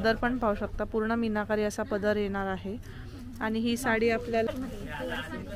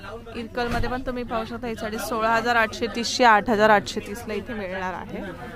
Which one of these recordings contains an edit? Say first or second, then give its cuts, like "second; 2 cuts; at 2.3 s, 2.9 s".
first; 1 cut; at 4.5 s